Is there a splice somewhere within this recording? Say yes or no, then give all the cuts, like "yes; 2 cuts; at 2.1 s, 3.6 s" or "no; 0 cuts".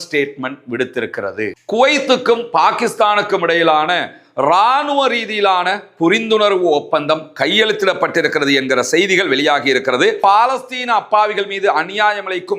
yes; 2 cuts; at 1.5 s, 10.2 s